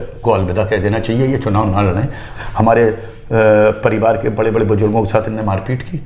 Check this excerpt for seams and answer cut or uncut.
cut